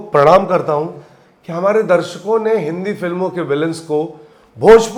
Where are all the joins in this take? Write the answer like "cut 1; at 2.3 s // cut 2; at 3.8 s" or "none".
none